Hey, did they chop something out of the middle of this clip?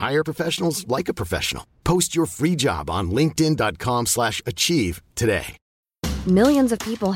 yes; 1 cut; at 5.6 s

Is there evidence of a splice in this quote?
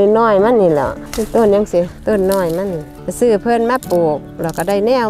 no; 0 cuts

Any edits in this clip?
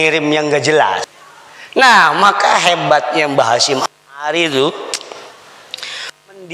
yes; 1 cut; at 1.1 s

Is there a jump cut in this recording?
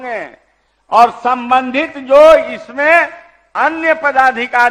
no; 0 cuts

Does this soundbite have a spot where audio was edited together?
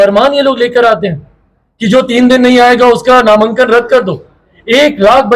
no; 0 cuts

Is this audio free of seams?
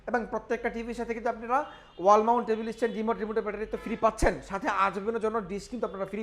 yes; 0 cuts

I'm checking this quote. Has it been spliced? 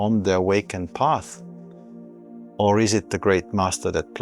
yes; 2 cuts; at 1.3 s, 2.5 s

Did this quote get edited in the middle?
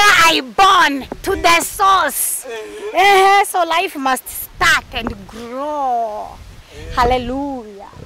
no; 0 cuts

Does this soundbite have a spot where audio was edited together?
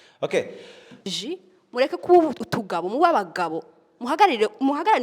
yes; 1 cut; at 1.0 s

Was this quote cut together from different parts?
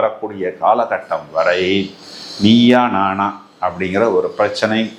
no; 0 cuts

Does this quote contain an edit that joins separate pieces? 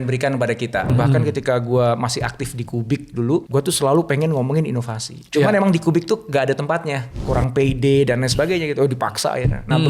yes; 3 cuts; at 0.9 s, 3.5 s, 7.2 s

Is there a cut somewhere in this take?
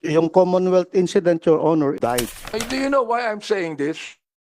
yes; 1 cut; at 2.0 s

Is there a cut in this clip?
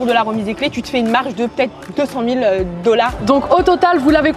yes; 1 cut; at 3.2 s

